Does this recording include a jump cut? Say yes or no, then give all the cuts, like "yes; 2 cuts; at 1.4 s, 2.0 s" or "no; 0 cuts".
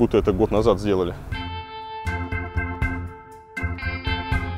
no; 0 cuts